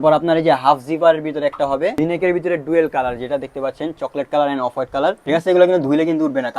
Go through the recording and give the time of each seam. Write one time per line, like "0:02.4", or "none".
0:01.9
0:05.2